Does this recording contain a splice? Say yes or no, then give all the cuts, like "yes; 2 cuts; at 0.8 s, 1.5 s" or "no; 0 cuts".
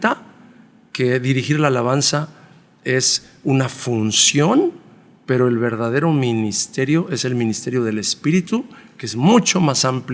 no; 0 cuts